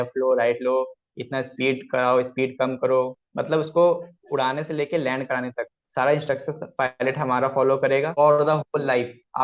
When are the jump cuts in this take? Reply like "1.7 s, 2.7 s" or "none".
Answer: 8.2 s

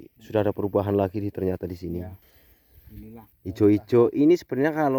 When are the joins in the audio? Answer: 3.3 s

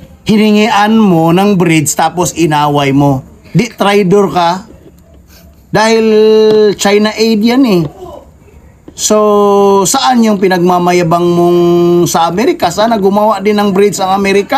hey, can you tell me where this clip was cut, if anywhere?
none

